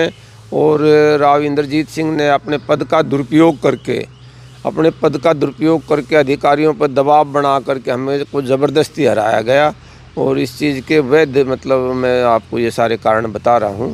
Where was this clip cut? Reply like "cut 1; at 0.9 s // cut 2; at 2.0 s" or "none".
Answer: none